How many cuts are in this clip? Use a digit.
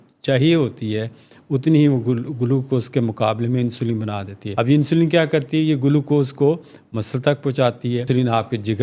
2